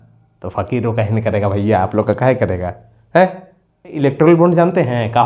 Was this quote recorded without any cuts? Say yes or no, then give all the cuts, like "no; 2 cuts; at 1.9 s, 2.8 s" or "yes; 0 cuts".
no; 1 cut; at 4.0 s